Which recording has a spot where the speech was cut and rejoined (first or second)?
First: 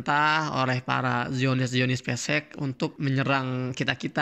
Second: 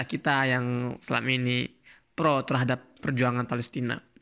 first